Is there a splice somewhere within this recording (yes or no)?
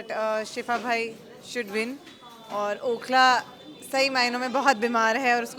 no